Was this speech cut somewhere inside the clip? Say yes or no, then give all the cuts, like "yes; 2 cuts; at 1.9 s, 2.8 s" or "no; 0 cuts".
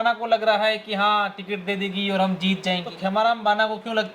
yes; 1 cut; at 3.0 s